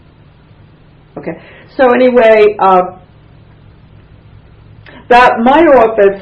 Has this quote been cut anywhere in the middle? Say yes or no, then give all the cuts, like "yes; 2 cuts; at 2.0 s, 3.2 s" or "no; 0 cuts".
yes; 1 cut; at 1.9 s